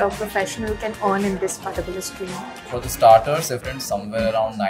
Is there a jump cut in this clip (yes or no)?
yes